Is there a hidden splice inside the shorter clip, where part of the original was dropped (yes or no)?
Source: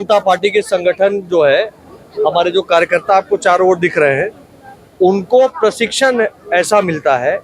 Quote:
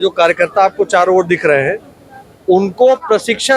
no